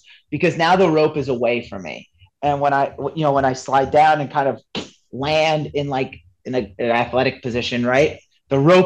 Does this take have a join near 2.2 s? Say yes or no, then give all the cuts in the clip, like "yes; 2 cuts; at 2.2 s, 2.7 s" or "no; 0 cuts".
yes; 1 cut; at 2.2 s